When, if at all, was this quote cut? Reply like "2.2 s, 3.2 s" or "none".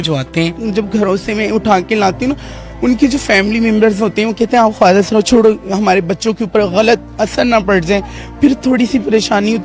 none